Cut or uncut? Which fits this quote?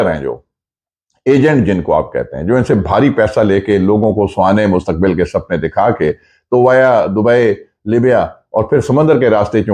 uncut